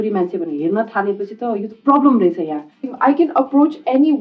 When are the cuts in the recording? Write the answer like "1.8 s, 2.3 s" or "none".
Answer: 2.9 s